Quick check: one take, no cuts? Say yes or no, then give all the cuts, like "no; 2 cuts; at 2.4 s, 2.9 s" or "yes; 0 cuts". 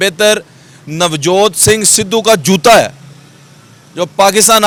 yes; 0 cuts